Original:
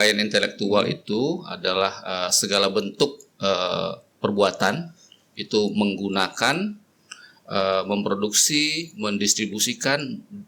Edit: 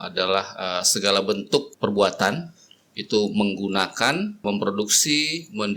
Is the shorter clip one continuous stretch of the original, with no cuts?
no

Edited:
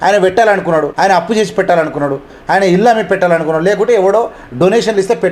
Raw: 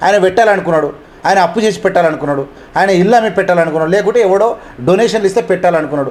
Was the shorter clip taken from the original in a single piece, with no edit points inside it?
no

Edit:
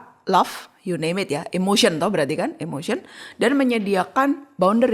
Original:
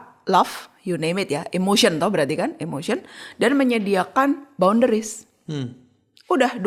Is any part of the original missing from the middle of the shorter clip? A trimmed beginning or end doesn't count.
no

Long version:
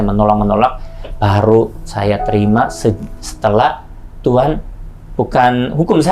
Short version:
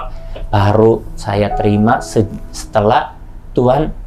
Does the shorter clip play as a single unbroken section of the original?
yes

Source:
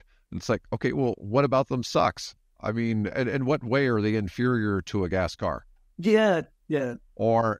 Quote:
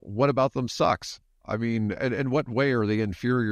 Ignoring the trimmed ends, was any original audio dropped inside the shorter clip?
no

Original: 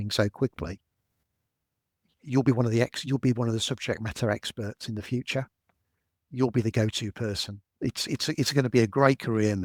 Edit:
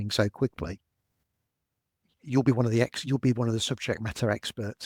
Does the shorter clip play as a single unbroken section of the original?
yes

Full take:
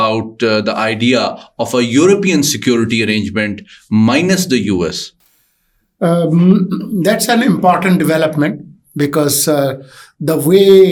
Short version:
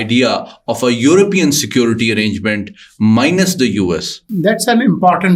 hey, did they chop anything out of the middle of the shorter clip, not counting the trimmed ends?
yes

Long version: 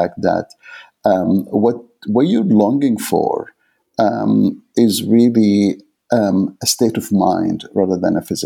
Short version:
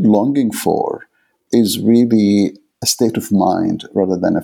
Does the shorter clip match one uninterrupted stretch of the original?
no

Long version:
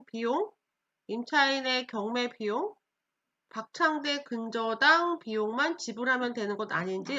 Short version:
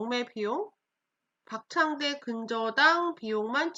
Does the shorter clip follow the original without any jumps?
yes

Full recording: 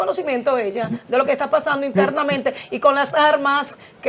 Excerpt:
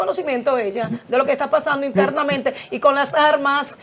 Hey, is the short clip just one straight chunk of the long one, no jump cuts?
yes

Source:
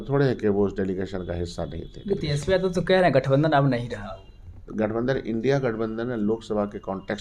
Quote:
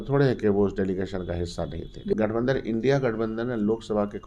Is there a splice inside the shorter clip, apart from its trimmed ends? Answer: yes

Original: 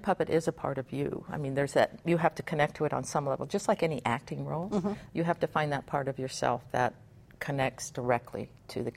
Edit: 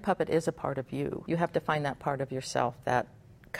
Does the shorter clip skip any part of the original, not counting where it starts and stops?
yes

